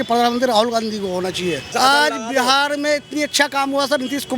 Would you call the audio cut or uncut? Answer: cut